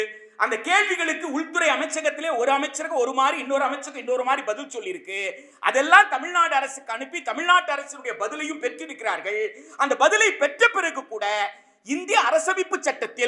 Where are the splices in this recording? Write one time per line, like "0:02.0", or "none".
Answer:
none